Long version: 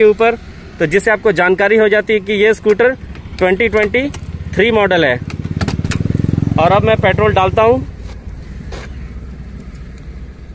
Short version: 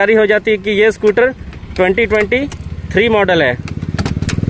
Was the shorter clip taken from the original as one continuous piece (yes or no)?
yes